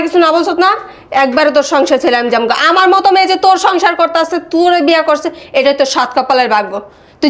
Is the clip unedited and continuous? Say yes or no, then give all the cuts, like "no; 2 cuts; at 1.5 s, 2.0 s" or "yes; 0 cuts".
yes; 0 cuts